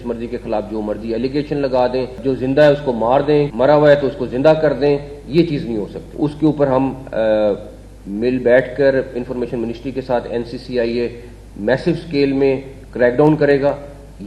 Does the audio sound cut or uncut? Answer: cut